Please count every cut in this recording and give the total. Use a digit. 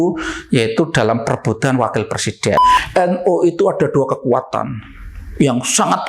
1